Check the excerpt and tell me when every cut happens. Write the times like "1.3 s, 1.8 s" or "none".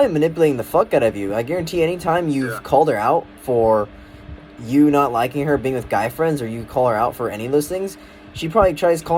none